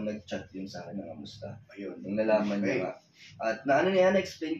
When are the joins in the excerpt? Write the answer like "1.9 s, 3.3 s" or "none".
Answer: none

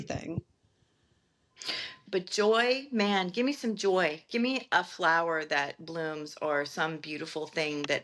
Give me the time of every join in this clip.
1.9 s

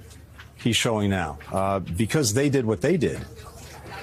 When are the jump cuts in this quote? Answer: none

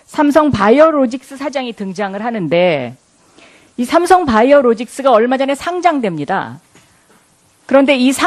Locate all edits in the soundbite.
2.3 s

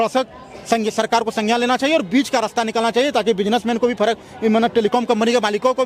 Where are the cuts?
none

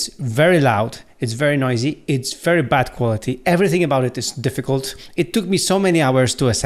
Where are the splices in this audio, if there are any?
none

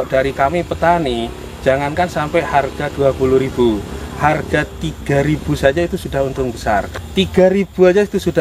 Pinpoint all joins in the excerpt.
6.8 s

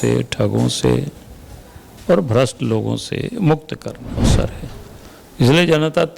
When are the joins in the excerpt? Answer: 4.3 s

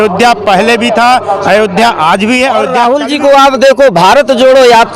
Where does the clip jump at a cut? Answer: 2.7 s

